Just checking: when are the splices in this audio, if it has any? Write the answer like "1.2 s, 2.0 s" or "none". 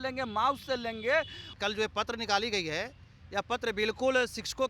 1.5 s